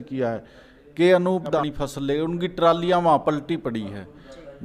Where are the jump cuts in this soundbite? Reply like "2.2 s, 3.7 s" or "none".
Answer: 1.6 s